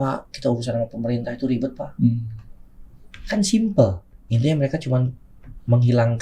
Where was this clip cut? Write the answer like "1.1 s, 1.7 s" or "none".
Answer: none